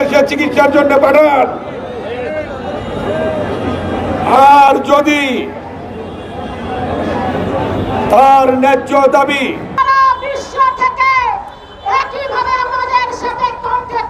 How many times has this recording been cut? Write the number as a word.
one